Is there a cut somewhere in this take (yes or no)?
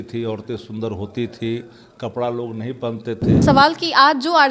yes